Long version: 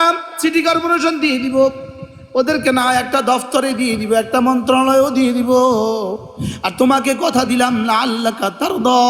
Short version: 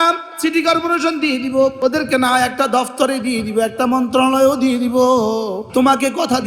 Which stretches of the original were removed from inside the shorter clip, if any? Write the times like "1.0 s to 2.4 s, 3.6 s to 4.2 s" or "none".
1.8 s to 2.3 s, 6.2 s to 6.7 s